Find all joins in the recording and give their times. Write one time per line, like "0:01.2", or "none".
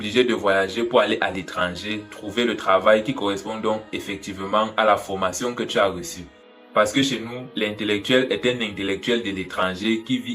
0:06.5